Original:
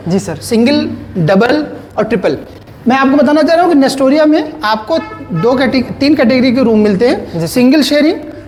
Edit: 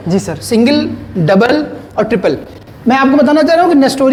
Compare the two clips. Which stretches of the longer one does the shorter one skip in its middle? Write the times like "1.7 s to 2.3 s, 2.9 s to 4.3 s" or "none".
none